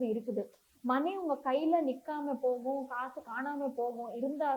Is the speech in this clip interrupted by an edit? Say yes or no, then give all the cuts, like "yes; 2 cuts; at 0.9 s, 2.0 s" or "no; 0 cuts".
no; 0 cuts